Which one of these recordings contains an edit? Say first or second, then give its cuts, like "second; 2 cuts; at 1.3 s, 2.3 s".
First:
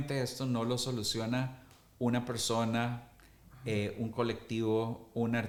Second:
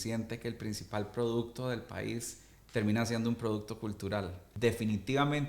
second; 1 cut; at 4.4 s